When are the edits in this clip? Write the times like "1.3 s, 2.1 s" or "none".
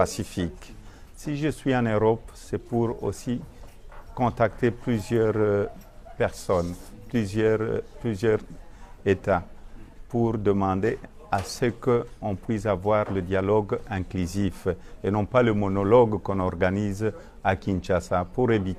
none